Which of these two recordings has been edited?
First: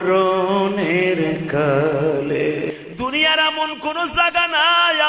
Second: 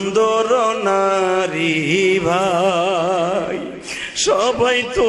first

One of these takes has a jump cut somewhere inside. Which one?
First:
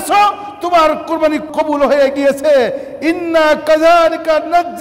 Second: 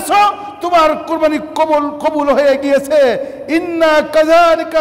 first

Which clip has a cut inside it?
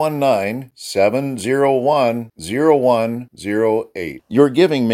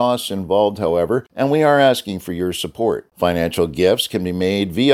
second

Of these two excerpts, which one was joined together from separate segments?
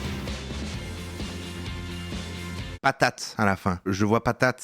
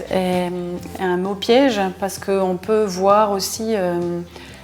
first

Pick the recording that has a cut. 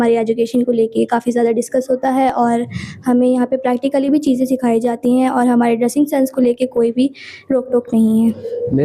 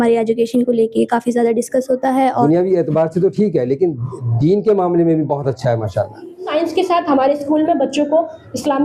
second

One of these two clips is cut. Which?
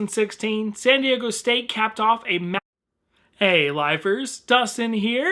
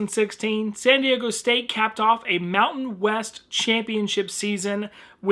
second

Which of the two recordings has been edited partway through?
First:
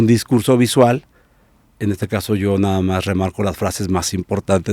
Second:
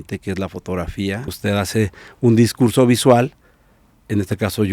second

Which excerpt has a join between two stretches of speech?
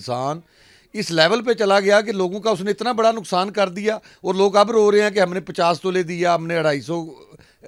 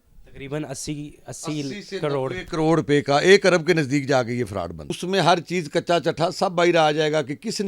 second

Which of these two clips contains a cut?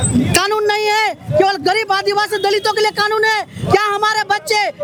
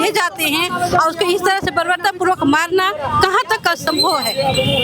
second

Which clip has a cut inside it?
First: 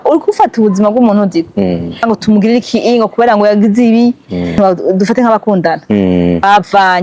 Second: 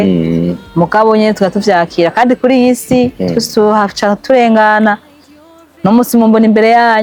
first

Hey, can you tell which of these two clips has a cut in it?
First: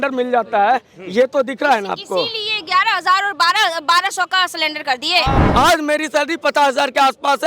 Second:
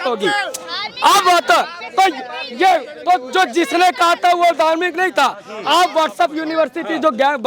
first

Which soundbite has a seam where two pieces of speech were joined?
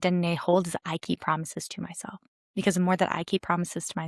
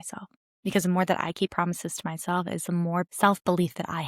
second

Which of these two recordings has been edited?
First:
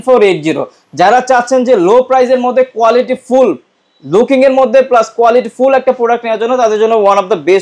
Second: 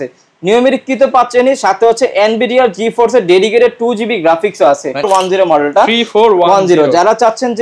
second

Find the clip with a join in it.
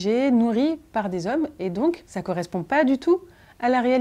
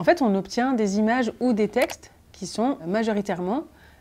second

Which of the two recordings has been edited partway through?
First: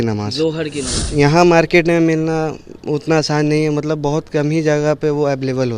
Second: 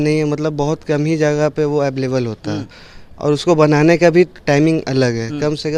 first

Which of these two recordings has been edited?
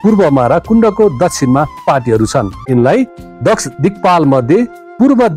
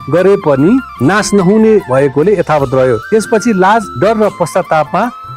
first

